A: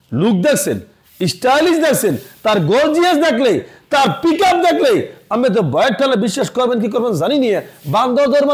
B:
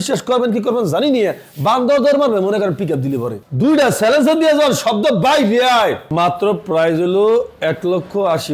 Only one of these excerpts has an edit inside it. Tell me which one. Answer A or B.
B